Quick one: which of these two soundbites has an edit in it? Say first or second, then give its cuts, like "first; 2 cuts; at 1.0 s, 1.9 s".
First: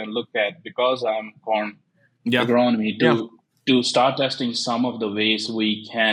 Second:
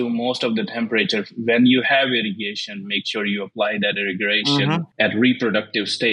second; 1 cut; at 4.9 s